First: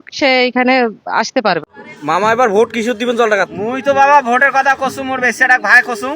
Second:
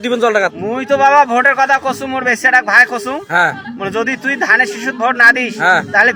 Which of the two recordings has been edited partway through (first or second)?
first